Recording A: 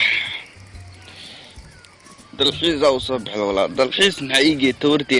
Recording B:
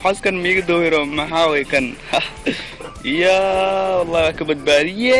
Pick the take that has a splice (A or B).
B